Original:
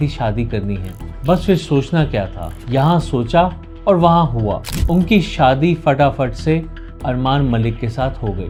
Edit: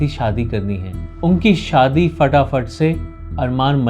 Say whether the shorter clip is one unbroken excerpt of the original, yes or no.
no